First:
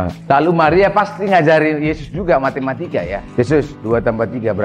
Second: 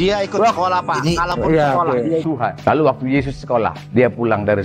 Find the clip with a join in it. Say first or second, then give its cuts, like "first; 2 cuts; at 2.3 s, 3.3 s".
second; 1 cut; at 2.2 s